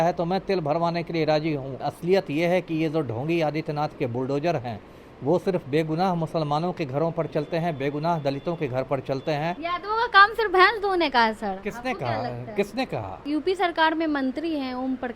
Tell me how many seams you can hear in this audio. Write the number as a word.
three